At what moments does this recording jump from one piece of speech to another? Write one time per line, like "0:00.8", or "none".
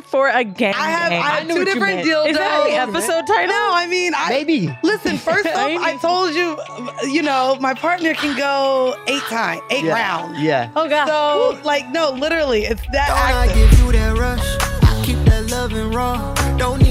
0:13.2